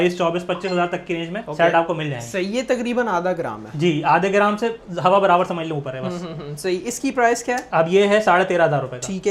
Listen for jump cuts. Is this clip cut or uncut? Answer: uncut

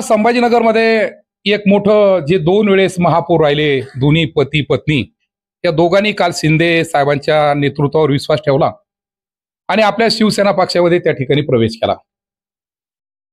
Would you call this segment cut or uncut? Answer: uncut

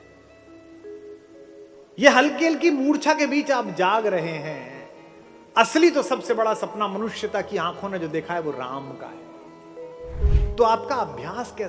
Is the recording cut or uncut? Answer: cut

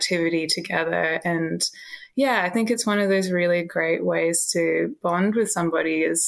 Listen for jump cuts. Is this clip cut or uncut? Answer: uncut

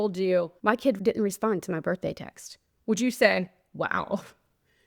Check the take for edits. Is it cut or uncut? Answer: cut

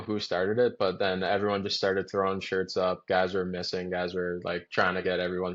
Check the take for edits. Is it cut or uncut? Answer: uncut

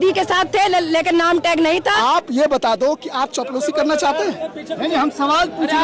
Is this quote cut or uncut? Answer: cut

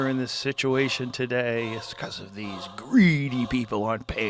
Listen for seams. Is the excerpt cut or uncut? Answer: uncut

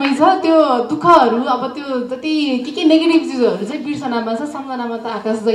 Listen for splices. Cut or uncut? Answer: uncut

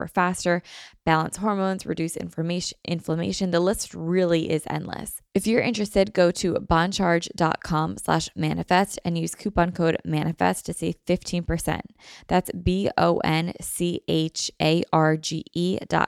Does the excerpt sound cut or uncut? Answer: cut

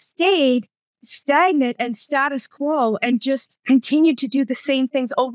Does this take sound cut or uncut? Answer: uncut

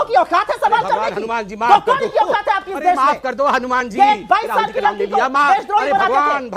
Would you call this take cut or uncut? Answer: uncut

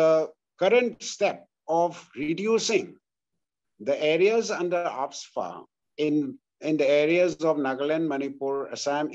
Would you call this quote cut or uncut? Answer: uncut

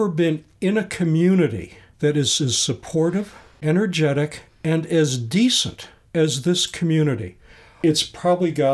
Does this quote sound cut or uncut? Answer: cut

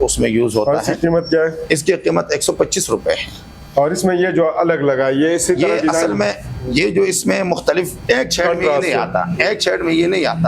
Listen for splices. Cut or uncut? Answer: uncut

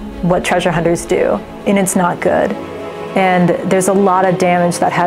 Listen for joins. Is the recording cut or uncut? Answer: uncut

